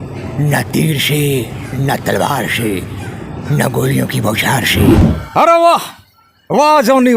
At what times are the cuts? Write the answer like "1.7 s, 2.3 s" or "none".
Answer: 5.1 s